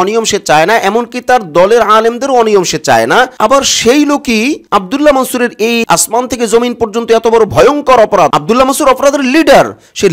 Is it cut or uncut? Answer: uncut